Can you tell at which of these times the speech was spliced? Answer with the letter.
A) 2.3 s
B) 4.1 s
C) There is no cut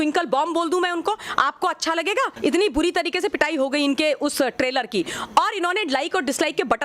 A